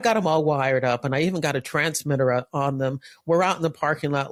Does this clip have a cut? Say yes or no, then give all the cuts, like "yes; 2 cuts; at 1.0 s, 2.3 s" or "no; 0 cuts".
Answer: no; 0 cuts